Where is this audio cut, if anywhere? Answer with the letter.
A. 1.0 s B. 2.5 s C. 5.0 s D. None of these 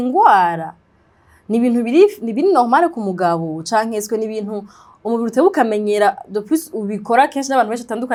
D